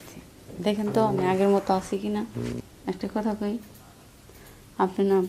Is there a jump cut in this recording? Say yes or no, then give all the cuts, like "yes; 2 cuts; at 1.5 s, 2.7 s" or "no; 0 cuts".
yes; 1 cut; at 2.7 s